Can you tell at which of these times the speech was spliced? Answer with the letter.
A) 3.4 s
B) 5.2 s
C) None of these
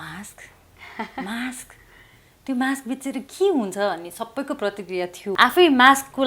B